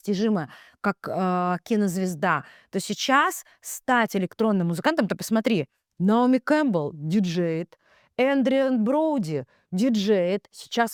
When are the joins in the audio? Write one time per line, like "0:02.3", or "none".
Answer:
none